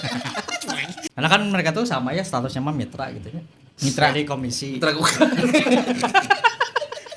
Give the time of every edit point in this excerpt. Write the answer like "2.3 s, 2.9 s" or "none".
1.0 s

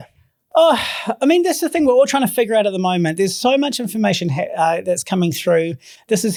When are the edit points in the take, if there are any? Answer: none

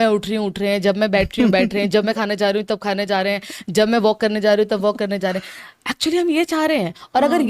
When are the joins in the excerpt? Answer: none

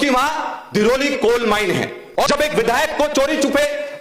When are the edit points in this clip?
2.3 s

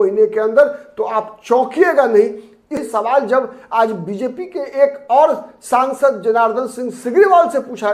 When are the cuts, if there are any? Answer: 2.8 s

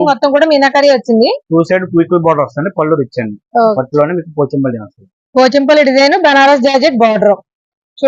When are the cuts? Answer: 3.7 s

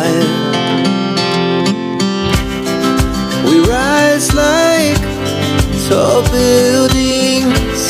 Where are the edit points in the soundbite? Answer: none

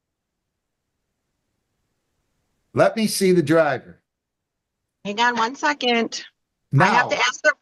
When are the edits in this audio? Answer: none

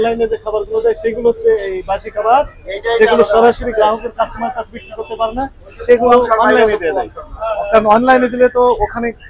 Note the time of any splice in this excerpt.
none

